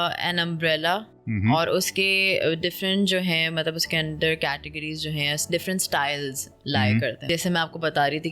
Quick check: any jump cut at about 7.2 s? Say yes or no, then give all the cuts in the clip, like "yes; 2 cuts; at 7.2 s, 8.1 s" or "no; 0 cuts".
yes; 1 cut; at 7.2 s